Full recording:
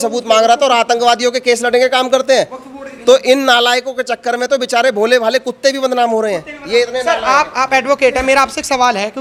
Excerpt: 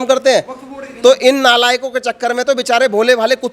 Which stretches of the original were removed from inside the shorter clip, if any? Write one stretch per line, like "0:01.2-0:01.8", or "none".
none